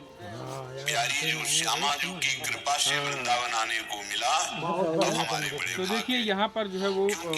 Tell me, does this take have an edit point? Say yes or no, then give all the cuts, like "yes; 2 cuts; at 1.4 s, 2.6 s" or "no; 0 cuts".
no; 0 cuts